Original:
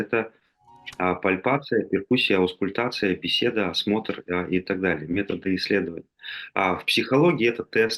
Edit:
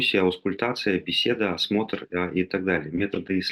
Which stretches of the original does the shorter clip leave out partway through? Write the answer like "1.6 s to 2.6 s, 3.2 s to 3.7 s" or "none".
none